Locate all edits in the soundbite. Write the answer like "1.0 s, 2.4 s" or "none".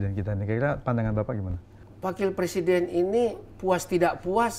none